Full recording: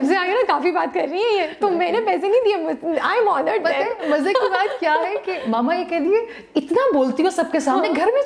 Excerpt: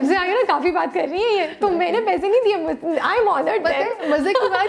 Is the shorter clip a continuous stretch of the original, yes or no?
yes